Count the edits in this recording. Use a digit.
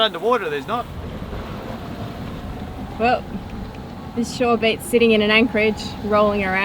1